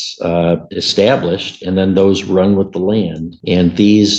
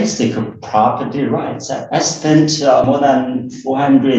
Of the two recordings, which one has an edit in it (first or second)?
second